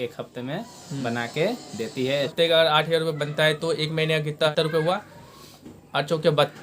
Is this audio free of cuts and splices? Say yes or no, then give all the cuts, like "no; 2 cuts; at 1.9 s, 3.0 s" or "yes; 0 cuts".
no; 2 cuts; at 2.3 s, 4.5 s